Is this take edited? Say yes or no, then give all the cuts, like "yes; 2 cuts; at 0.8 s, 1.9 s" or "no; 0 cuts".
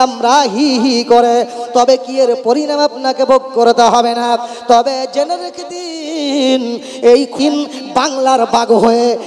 yes; 1 cut; at 7.4 s